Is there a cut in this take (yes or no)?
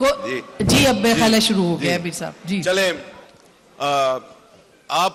no